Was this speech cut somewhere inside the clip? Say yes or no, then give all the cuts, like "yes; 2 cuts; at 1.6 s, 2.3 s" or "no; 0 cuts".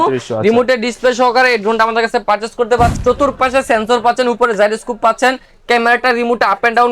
yes; 1 cut; at 3.0 s